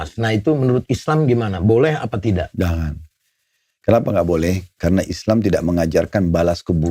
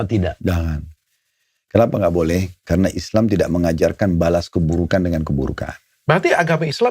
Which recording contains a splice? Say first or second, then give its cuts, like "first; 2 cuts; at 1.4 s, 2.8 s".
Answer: second; 1 cut; at 5.9 s